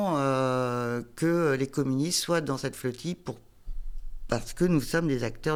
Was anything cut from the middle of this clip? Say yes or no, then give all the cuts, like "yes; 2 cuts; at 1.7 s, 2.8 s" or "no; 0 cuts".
no; 0 cuts